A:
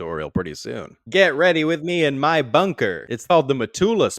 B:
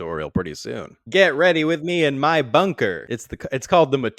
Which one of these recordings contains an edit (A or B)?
A